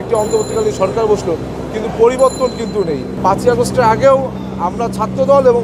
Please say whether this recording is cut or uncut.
cut